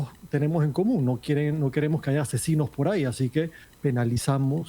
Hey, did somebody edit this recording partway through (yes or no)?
yes